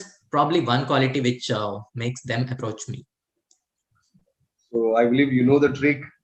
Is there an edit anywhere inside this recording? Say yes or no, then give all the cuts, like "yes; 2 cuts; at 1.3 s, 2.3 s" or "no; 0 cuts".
no; 0 cuts